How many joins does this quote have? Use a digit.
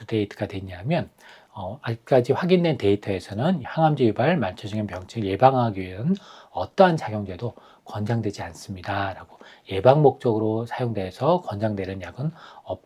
1